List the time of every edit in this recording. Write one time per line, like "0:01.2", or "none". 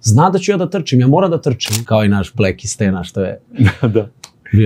0:01.7